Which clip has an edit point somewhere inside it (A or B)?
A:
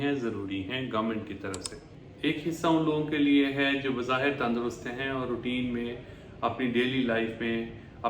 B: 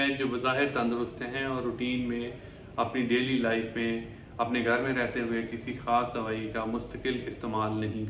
A